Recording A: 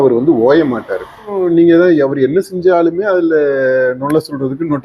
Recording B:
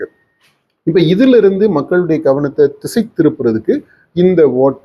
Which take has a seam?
A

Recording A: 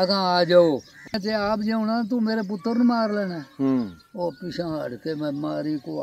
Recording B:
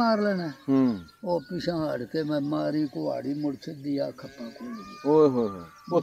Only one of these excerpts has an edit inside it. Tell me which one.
A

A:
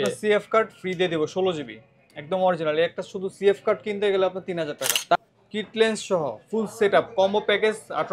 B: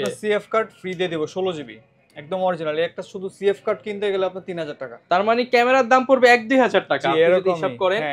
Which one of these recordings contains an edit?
A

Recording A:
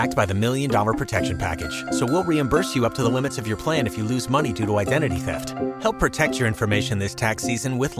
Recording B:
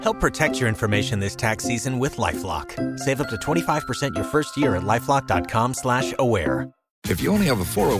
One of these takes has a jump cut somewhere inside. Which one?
B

